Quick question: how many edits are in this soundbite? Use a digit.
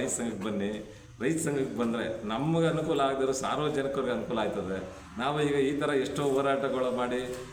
0